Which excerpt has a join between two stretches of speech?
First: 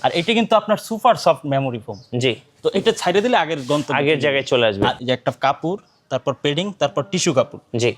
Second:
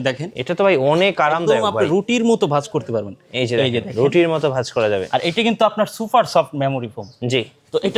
first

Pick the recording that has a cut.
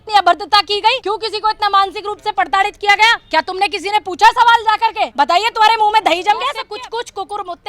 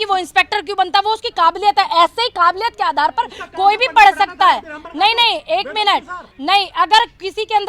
first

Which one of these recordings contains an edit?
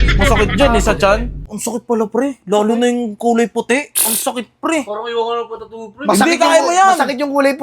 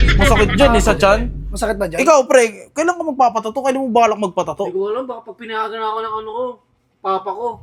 first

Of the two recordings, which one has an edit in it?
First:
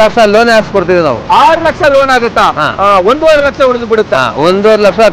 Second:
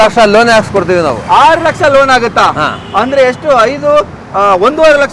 first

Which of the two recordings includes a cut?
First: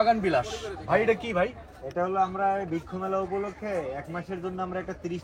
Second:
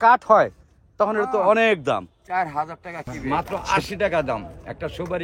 second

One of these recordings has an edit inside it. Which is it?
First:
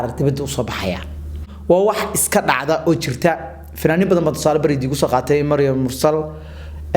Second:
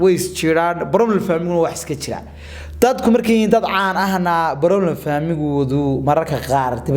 first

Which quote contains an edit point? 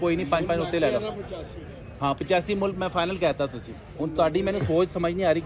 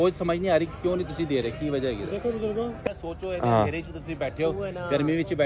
second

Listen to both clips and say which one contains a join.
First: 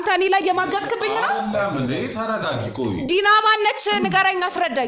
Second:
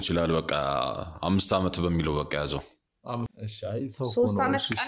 second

